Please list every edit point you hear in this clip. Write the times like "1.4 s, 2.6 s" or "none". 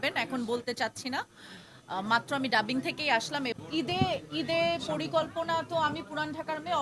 3.6 s